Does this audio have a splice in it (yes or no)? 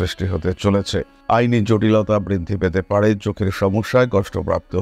no